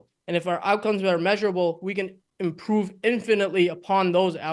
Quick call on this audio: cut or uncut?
uncut